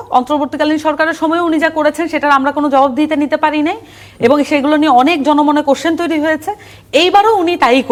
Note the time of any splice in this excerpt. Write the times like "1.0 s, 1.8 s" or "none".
none